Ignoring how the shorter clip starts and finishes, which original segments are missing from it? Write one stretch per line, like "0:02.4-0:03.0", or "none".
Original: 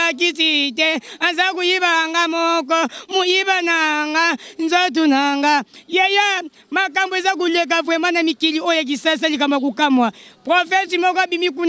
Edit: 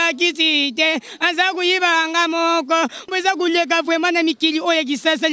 0:03.1-0:07.1